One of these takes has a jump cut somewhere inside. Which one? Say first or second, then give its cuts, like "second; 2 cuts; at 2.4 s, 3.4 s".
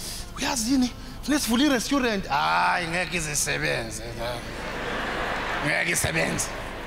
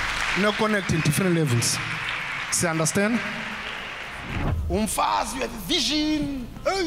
second; 1 cut; at 4.4 s